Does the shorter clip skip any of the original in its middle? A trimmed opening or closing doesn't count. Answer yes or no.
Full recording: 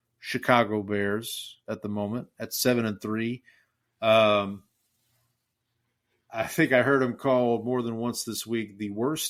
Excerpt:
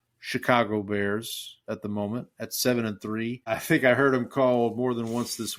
yes